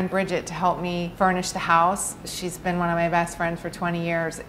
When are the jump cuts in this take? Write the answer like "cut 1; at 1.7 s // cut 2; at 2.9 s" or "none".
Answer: cut 1; at 1.1 s